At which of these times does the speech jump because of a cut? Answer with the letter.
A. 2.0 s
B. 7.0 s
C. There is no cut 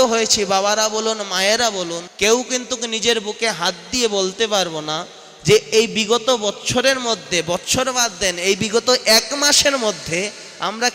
A